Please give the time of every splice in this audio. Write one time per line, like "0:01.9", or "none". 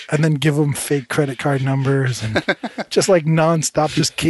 none